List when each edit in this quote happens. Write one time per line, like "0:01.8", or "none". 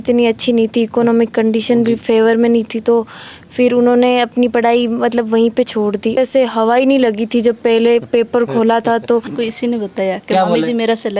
0:06.2
0:09.3